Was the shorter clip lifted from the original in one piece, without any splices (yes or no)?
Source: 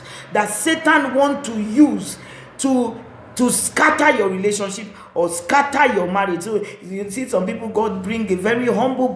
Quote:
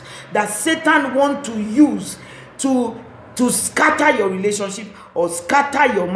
yes